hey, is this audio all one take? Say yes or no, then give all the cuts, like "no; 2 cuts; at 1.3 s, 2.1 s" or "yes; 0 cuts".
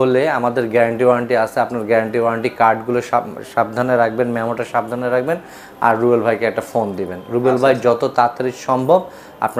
yes; 0 cuts